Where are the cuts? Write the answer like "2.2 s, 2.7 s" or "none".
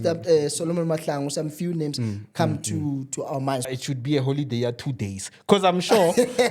3.7 s